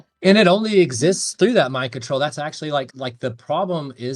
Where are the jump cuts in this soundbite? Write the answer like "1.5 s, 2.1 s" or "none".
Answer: 2.9 s